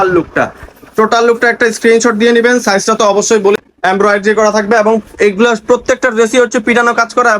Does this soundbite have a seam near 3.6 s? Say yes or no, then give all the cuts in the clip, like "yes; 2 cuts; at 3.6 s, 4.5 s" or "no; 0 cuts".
yes; 1 cut; at 3.6 s